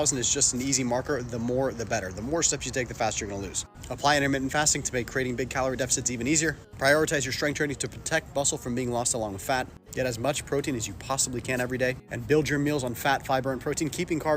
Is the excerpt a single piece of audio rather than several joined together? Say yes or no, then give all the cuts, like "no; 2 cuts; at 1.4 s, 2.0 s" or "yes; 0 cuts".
no; 4 cuts; at 3.6 s, 6.7 s, 9.8 s, 11.8 s